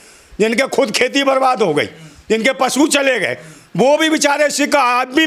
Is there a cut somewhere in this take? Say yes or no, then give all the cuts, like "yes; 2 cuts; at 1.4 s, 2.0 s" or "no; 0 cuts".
no; 0 cuts